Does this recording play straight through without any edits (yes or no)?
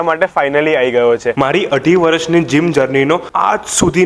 no